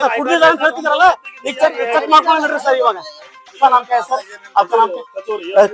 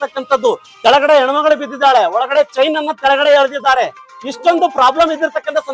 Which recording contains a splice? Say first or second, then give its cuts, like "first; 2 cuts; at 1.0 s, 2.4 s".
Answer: first; 1 cut; at 3.6 s